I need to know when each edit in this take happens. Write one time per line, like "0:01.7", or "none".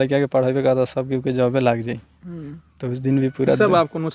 none